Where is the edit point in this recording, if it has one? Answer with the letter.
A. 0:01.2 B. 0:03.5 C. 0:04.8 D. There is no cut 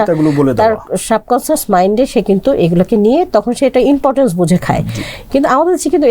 D